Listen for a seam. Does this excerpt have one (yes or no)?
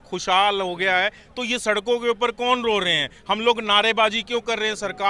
no